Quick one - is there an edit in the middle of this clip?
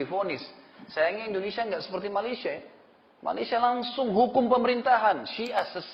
no; 0 cuts

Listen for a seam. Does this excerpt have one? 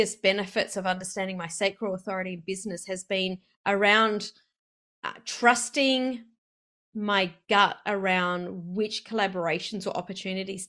no; 0 cuts

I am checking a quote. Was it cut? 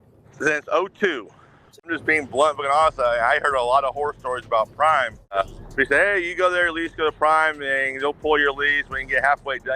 yes; 2 cuts; at 1.9 s, 5.3 s

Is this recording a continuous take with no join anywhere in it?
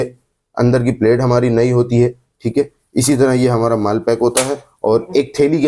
yes; 0 cuts

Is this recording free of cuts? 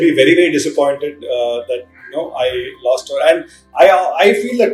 yes; 0 cuts

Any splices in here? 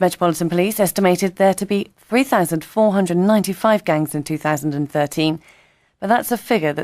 yes; 1 cut; at 2.6 s

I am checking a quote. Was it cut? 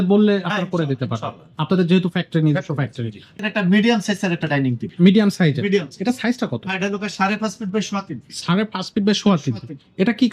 yes; 1 cut; at 3.4 s

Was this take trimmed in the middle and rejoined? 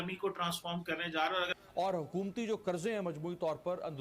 yes; 1 cut; at 1.5 s

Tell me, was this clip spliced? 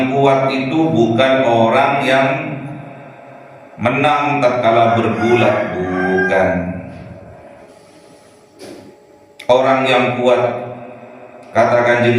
yes; 1 cut; at 7.6 s

